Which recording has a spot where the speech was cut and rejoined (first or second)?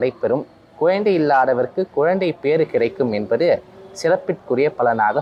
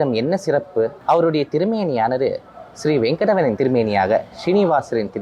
second